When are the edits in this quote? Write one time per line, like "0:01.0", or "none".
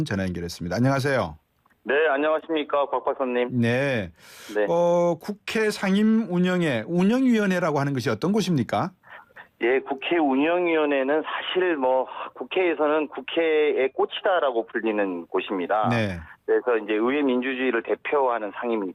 none

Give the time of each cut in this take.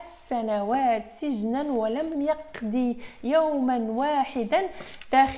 none

